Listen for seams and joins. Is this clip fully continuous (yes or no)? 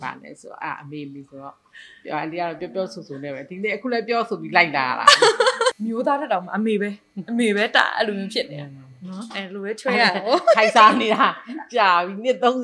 no